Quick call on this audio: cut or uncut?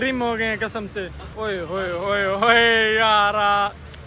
cut